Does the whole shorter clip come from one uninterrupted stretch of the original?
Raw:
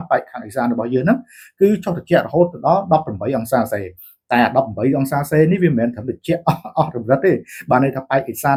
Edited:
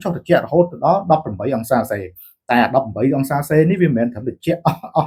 yes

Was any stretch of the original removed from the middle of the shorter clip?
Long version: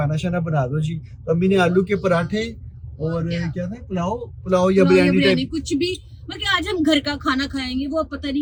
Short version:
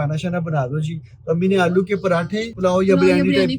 yes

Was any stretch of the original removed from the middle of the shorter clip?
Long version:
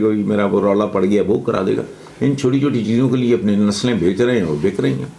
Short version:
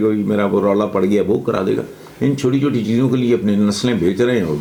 no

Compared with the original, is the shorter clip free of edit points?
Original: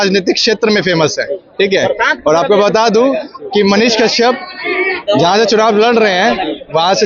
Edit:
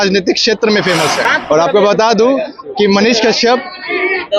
no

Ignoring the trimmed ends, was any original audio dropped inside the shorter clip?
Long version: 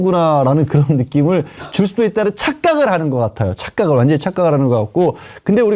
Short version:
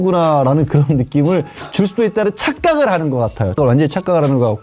yes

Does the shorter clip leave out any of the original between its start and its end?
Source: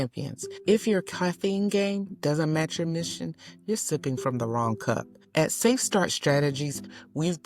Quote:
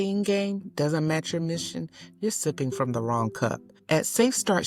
no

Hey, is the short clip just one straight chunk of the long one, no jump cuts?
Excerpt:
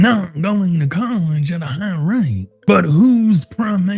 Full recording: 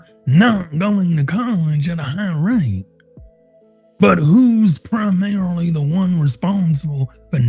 no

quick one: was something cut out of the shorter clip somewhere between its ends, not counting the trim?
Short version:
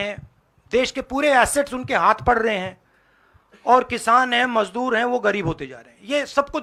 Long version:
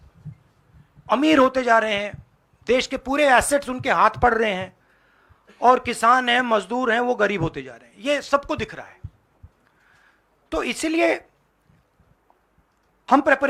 no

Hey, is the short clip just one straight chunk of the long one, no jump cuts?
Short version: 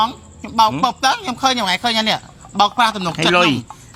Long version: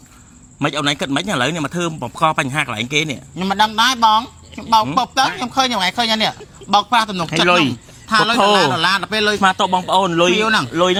yes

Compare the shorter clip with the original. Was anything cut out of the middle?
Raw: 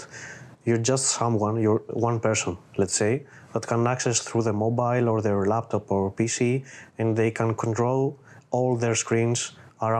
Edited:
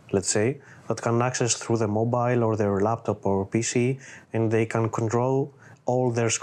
no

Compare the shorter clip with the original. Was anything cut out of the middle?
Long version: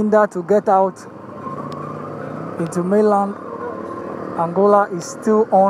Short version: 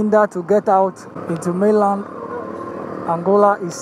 yes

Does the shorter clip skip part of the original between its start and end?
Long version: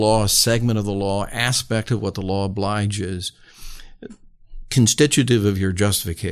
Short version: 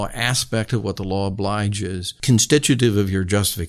yes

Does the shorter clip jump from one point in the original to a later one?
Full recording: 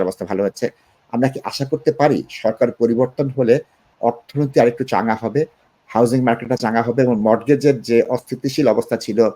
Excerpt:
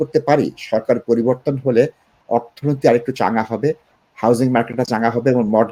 no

